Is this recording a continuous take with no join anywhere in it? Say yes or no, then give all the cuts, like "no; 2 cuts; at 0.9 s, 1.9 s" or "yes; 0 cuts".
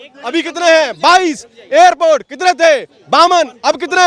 yes; 0 cuts